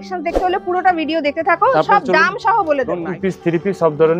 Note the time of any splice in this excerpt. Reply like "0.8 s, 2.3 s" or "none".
3.1 s

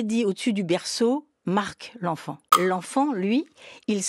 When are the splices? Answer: 2.5 s

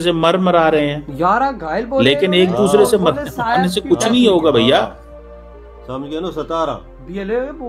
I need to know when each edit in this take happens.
none

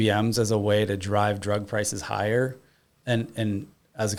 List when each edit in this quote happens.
none

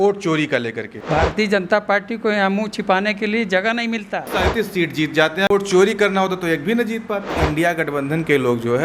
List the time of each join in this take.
1.0 s, 4.3 s, 5.5 s, 7.4 s

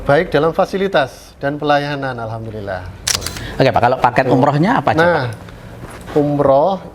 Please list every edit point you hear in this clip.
3.1 s

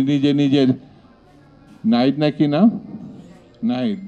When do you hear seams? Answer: none

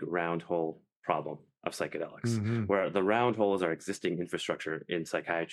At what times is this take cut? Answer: none

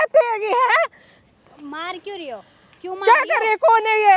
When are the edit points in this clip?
none

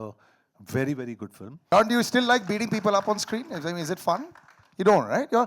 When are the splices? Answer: 1.7 s

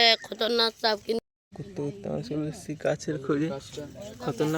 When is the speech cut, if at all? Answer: 1.2 s

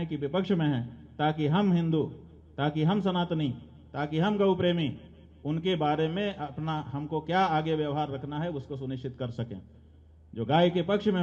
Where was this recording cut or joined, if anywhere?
none

